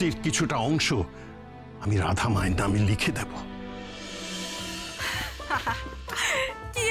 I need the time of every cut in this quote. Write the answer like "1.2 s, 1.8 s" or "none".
4.8 s